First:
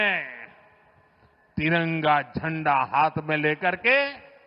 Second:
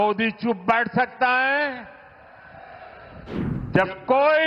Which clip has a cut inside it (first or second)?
second